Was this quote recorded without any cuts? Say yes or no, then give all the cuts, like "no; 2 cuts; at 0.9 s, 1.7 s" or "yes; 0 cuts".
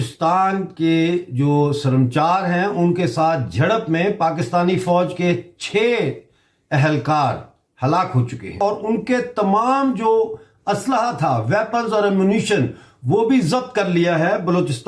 yes; 0 cuts